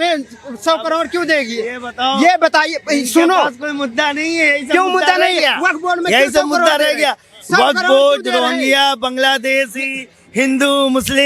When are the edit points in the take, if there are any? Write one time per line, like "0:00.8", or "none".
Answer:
none